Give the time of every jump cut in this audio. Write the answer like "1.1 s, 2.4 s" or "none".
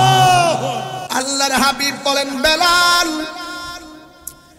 1.0 s